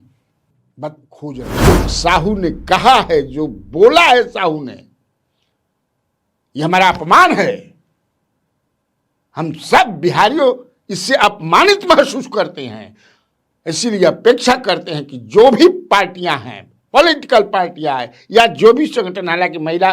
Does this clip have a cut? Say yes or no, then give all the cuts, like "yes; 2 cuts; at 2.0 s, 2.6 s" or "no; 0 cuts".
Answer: yes; 1 cut; at 1.7 s